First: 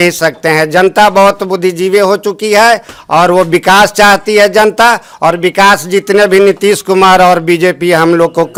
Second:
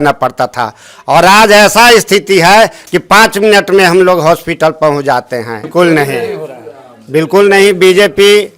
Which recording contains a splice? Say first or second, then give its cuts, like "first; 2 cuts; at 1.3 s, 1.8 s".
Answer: second; 1 cut; at 5.6 s